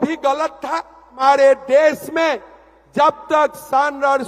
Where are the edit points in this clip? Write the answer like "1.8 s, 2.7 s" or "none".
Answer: 1.2 s